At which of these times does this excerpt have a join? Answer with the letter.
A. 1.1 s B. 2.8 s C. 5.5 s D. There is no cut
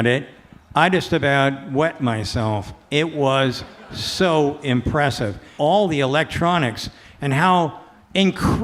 C